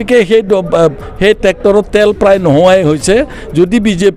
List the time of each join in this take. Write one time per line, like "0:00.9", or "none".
none